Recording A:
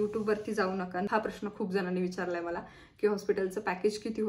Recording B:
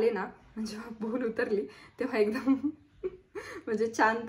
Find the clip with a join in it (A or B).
A